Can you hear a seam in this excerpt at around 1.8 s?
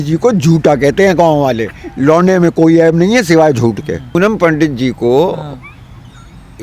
no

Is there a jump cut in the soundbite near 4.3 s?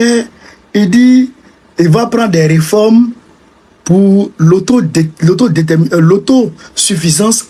no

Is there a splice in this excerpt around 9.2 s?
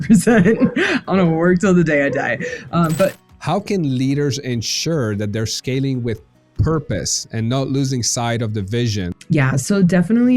yes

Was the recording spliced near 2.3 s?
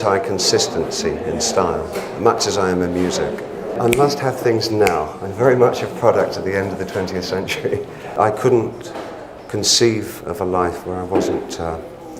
no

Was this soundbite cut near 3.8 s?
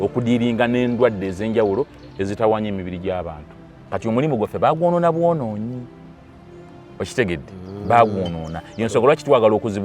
yes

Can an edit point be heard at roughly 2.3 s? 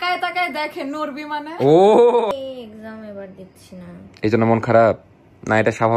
yes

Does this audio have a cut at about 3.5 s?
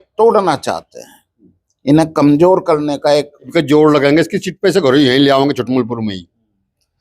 yes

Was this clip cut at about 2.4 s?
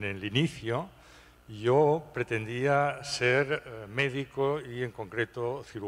yes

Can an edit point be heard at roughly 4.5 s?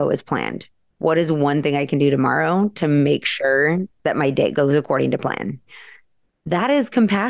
yes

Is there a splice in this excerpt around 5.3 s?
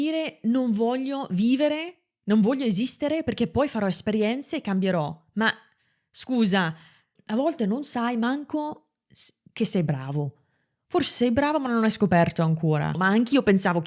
no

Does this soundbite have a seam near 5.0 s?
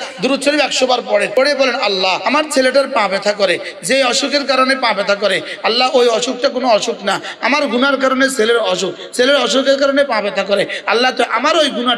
no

